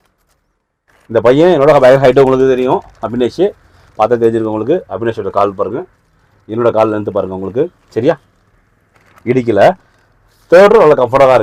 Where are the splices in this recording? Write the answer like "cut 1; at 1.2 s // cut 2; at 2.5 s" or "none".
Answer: none